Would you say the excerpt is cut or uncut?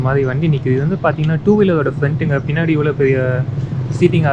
uncut